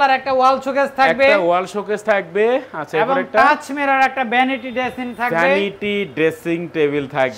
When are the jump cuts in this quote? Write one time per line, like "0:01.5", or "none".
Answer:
none